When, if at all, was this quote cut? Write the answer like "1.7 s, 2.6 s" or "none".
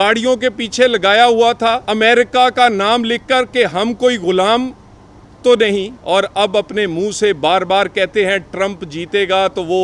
1.8 s, 6.0 s